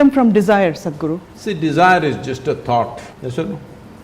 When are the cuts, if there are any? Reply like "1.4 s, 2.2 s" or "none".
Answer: 1.3 s, 3.1 s